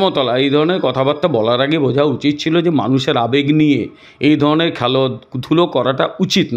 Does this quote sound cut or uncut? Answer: uncut